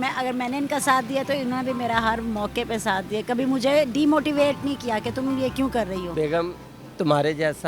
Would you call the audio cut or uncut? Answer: cut